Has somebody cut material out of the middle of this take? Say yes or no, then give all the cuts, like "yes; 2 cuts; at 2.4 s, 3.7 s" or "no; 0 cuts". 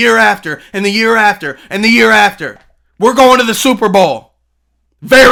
no; 0 cuts